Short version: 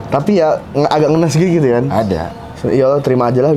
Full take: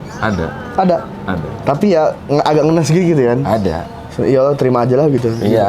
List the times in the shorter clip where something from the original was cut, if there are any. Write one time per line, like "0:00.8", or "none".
none